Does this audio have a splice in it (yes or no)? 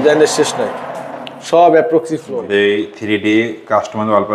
yes